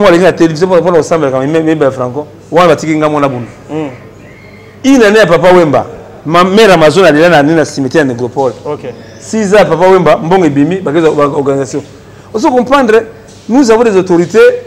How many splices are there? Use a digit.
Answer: 0